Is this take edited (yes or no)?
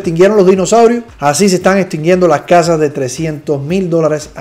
no